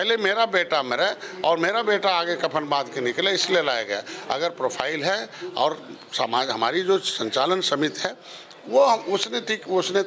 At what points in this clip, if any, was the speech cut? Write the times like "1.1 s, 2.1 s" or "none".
none